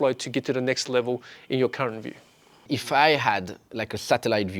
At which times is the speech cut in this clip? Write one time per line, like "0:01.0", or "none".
0:02.6